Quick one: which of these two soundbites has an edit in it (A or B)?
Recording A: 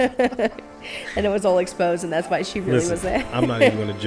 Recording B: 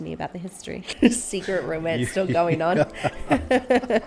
B